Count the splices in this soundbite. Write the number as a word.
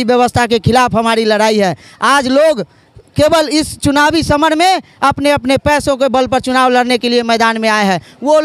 zero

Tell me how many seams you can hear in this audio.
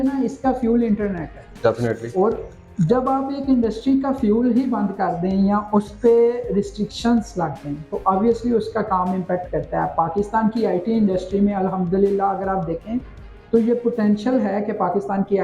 zero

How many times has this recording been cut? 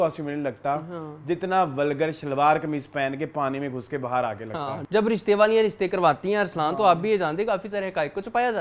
one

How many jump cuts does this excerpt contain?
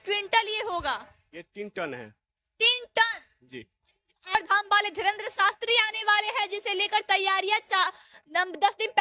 one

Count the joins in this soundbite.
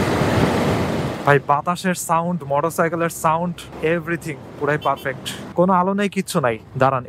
one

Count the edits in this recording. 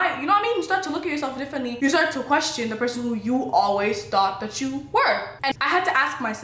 one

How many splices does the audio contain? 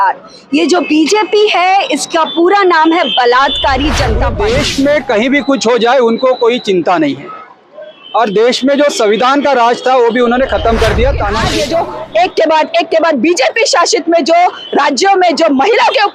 two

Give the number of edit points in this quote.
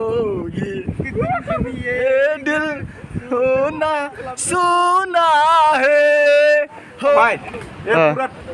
one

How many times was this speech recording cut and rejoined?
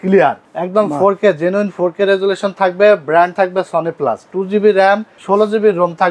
zero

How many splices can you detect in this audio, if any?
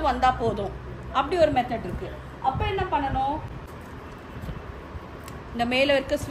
zero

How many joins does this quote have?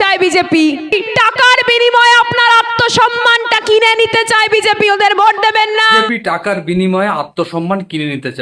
two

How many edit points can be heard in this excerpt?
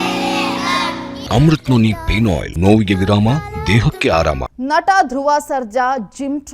three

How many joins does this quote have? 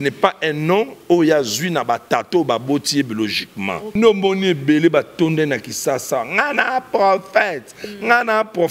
one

